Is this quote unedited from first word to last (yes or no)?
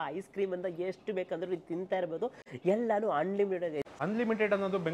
no